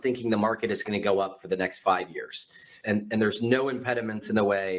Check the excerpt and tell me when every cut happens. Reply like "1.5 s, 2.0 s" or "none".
2.7 s